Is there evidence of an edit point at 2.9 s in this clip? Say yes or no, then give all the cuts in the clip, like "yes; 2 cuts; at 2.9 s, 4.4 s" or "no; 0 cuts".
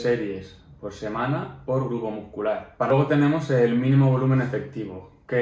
yes; 1 cut; at 2.9 s